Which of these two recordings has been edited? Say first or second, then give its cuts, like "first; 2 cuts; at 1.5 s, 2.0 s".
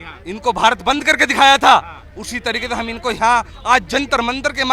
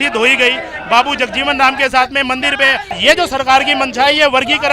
second; 1 cut; at 2.9 s